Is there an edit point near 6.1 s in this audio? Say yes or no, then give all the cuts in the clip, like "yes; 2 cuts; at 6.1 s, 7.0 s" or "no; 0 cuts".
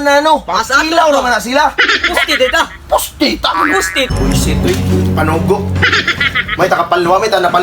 no; 1 cut; at 4.1 s